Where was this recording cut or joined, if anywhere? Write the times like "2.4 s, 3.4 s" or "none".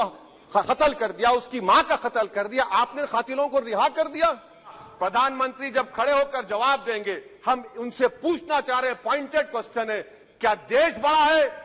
4.8 s